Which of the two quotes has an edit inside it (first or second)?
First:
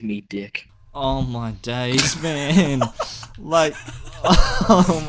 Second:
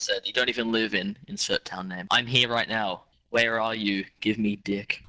second